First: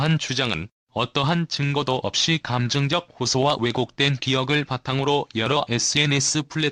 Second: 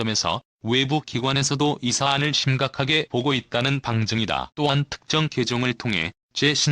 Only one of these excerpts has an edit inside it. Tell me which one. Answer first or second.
second